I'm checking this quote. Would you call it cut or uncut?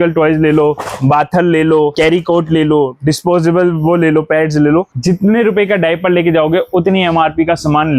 uncut